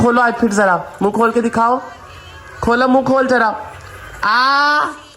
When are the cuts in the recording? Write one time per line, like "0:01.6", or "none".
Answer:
none